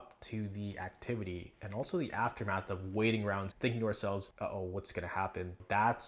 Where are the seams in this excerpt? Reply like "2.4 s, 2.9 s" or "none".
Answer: 3.5 s, 4.3 s

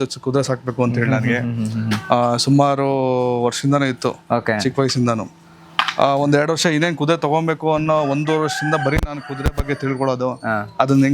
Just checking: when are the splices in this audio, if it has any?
none

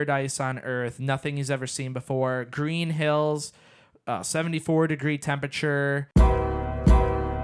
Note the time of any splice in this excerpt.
6.5 s

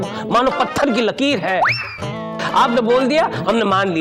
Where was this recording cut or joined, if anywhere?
none

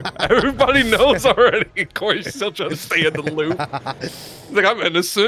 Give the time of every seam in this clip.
none

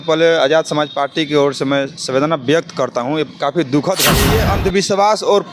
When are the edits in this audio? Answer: 4.3 s

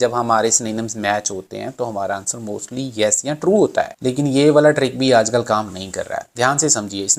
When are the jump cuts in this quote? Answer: none

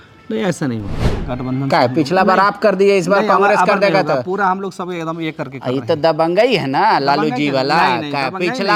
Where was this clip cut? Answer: none

